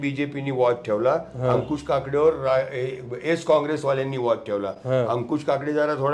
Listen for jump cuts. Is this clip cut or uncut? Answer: uncut